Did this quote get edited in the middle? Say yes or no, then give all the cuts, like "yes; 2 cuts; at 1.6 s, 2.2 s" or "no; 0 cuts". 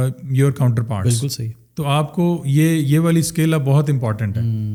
no; 0 cuts